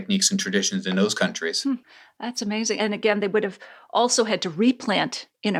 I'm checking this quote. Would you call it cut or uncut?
uncut